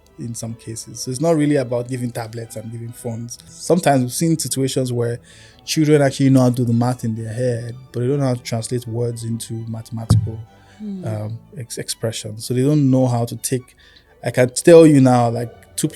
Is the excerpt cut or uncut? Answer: cut